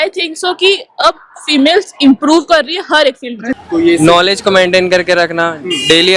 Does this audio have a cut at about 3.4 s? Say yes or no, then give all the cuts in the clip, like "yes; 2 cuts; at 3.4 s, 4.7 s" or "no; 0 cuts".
yes; 1 cut; at 3.4 s